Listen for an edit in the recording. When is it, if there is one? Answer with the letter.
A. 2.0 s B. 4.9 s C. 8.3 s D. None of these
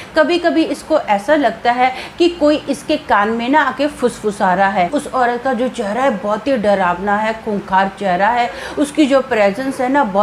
B